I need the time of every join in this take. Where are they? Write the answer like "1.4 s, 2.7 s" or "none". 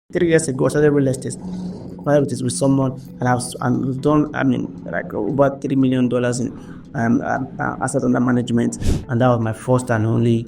8.9 s